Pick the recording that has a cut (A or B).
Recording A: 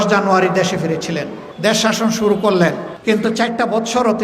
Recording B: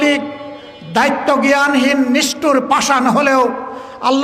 A